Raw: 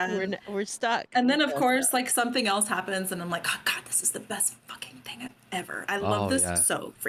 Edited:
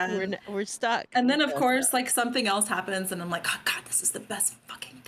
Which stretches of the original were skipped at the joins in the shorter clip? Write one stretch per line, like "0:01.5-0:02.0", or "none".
none